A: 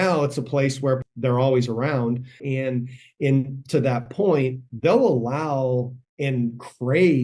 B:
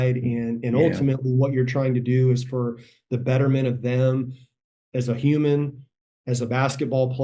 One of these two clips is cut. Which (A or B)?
A